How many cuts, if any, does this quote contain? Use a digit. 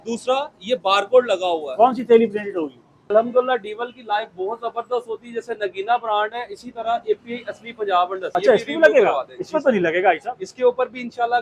2